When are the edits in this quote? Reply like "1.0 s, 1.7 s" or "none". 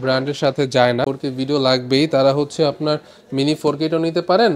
1.0 s